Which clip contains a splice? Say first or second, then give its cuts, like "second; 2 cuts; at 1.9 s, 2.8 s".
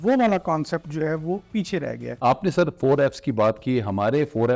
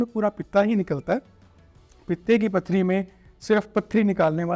first; 1 cut; at 2.1 s